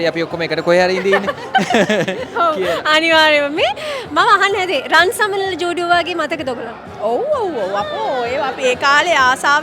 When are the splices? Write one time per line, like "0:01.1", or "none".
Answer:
none